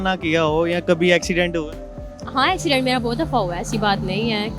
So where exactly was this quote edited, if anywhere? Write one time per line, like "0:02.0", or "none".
none